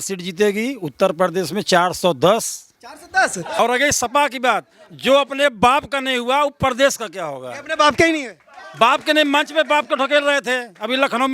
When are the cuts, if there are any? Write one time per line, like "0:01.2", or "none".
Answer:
0:03.6